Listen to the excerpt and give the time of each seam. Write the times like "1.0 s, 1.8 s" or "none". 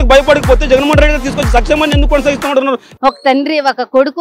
2.9 s